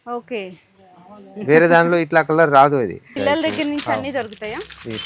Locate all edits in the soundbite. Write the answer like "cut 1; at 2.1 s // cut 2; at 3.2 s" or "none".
cut 1; at 3.0 s